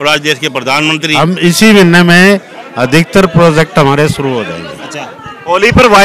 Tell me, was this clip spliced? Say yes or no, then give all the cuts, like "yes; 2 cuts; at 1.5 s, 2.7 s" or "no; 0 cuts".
yes; 2 cuts; at 1.1 s, 2.9 s